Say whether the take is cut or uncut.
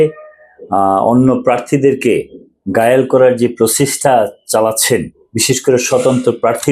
uncut